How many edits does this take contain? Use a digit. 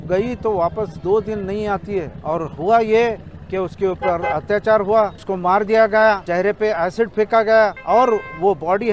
4